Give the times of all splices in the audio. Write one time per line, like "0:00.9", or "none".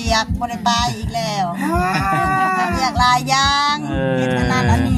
none